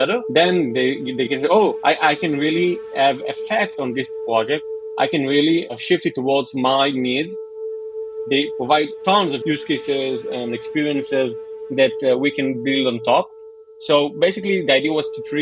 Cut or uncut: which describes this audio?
cut